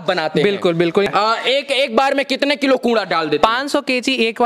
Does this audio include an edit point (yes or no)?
yes